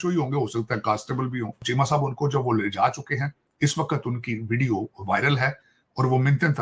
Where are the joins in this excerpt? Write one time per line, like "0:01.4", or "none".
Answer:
0:01.6